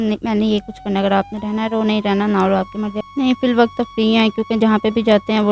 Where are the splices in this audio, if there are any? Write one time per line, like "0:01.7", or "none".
0:03.0